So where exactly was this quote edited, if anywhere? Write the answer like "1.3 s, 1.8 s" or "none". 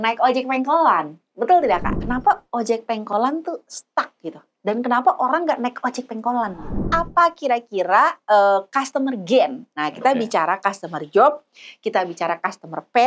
2.0 s, 6.9 s